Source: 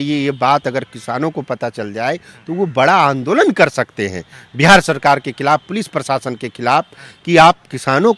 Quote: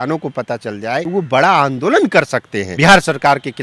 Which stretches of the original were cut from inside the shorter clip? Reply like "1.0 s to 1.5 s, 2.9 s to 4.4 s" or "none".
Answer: 2.2 s to 2.5 s, 4.0 s to 4.4 s